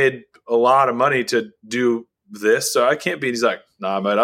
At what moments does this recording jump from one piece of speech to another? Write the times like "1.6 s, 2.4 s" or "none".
none